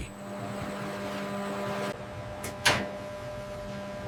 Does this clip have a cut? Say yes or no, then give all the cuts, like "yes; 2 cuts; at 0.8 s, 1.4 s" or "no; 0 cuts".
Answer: no; 0 cuts